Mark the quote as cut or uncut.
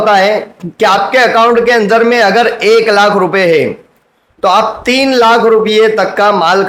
uncut